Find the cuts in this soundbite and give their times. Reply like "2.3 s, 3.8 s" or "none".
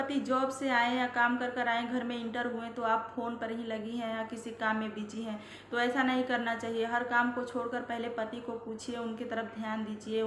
none